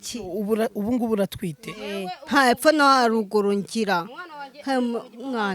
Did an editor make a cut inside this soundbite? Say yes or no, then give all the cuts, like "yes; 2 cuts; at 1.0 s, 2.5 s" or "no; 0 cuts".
no; 0 cuts